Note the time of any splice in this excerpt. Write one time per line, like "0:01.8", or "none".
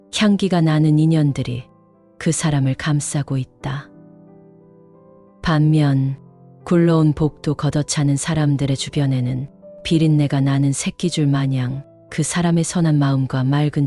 0:03.8
0:05.4

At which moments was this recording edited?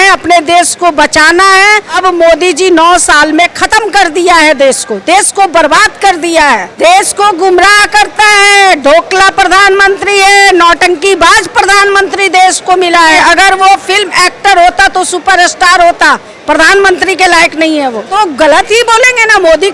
0:01.9
0:06.7
0:13.2
0:18.1

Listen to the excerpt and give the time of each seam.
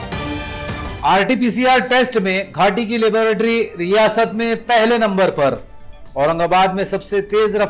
none

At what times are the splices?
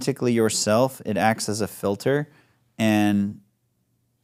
none

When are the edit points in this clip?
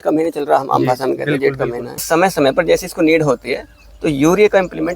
0:02.0

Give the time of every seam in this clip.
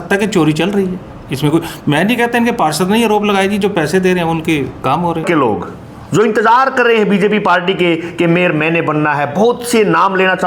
0:05.2

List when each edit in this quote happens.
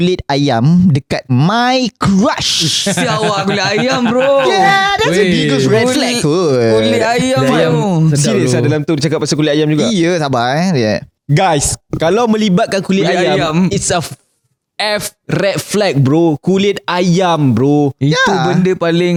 none

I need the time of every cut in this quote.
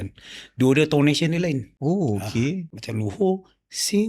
0:01.7
0:02.8

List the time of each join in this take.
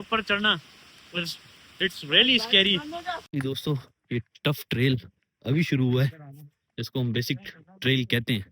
0:03.3

